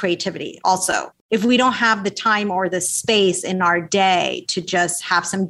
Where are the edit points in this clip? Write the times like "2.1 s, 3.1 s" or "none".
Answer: 1.2 s